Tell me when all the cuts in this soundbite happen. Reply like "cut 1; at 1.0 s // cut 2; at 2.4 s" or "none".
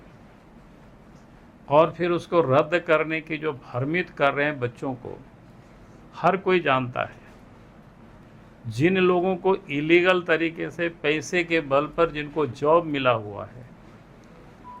cut 1; at 8.2 s